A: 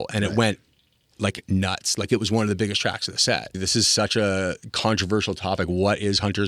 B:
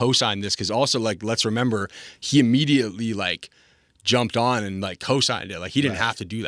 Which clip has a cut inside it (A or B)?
A